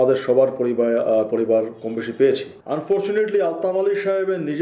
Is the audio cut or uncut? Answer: cut